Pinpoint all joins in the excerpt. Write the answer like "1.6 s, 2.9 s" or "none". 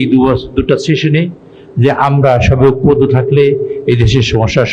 none